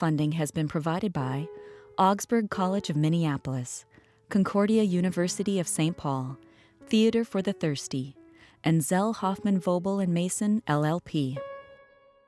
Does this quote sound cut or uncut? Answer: cut